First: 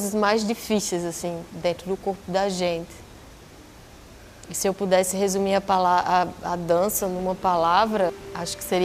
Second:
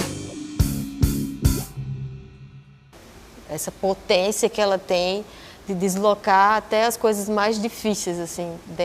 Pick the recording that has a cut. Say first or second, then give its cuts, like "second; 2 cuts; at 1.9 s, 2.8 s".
second; 1 cut; at 2.6 s